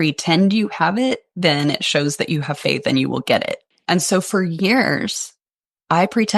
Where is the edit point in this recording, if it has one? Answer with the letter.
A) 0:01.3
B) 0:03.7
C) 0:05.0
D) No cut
B